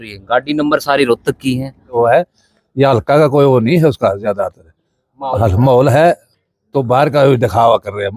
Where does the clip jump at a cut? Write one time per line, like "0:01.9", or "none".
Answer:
0:01.9